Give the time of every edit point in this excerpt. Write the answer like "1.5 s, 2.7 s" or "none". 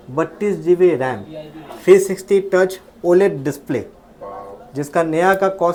none